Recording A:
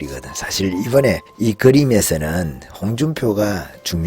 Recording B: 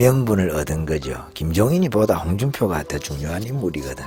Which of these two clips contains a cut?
A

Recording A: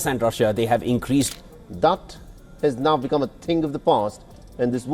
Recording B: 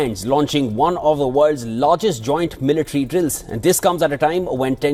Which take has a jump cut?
A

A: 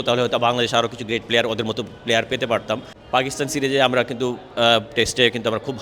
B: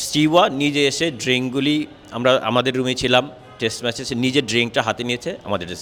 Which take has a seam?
A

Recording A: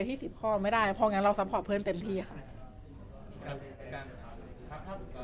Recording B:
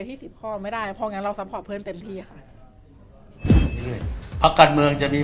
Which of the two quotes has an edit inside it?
B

